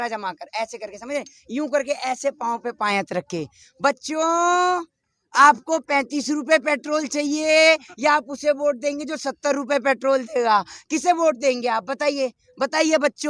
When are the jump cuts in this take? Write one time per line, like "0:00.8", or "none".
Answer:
none

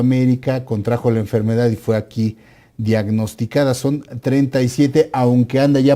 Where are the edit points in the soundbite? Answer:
none

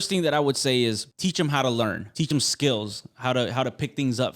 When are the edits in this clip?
0:01.1
0:02.3

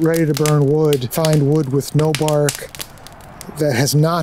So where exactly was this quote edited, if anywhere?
0:01.1

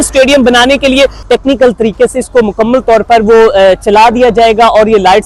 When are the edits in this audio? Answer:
0:01.2

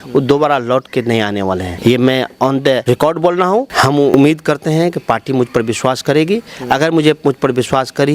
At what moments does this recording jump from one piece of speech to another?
0:01.7
0:02.8
0:03.7

